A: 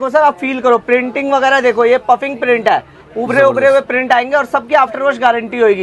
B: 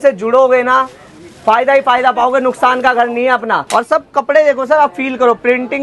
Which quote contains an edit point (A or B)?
B